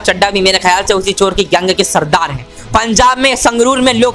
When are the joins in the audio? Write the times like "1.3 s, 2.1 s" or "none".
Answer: 2.5 s